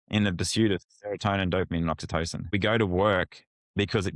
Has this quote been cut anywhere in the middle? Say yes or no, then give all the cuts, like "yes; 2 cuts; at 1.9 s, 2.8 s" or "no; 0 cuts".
yes; 1 cut; at 2.5 s